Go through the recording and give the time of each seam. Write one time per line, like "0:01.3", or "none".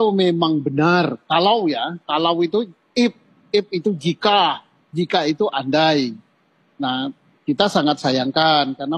none